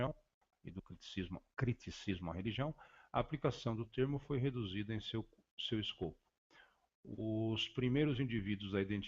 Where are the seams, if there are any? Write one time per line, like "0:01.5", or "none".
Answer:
0:04.3